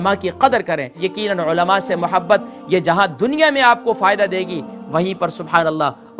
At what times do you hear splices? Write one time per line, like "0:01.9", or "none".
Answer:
0:01.1